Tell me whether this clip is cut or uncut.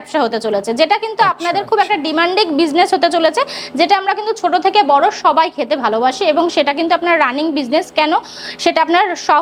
uncut